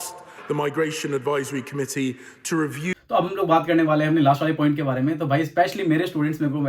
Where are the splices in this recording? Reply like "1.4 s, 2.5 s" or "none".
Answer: 2.9 s